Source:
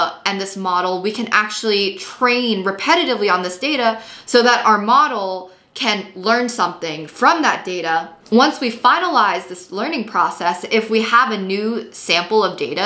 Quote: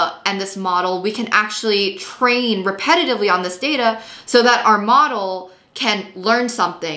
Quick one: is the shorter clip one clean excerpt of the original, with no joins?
yes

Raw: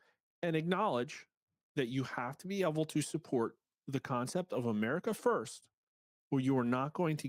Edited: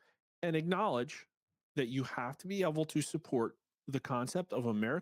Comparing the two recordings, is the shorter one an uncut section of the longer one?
yes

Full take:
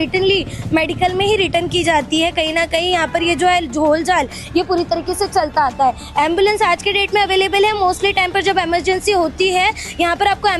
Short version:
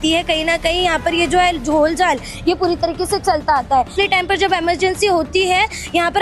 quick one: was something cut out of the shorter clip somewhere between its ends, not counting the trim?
yes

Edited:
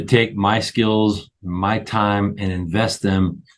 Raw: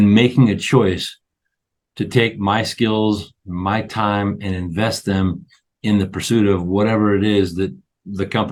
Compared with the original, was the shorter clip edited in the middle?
no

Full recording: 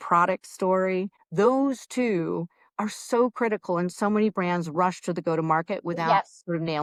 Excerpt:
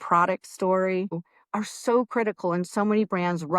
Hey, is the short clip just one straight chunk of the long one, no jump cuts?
no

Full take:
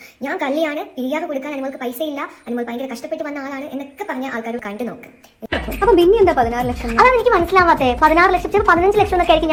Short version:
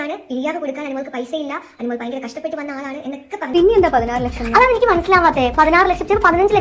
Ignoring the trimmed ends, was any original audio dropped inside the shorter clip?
yes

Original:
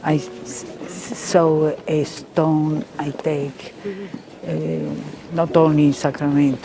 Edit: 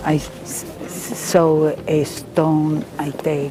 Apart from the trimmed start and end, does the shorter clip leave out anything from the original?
no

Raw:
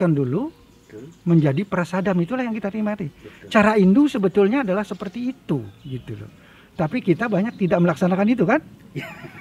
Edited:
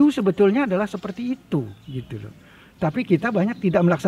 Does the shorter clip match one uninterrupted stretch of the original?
yes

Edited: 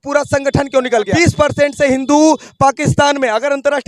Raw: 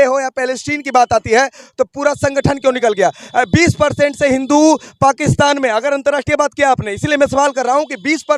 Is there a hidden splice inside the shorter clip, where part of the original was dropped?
yes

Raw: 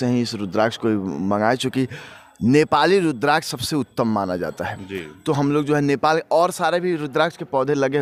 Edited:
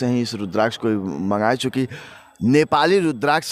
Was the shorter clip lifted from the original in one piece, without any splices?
yes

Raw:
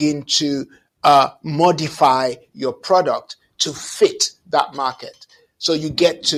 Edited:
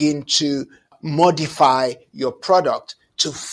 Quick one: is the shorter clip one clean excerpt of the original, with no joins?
no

